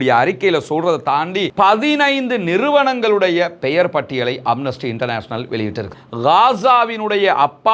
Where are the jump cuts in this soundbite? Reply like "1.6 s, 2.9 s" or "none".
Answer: 1.5 s, 5.9 s